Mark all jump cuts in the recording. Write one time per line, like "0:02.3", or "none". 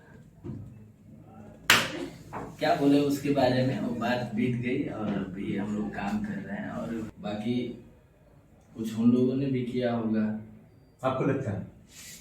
0:07.1